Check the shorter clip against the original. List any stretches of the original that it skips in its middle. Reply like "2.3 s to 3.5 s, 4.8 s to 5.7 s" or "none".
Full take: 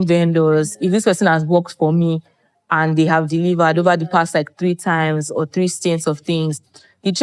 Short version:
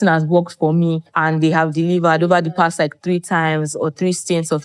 2.3 s to 2.6 s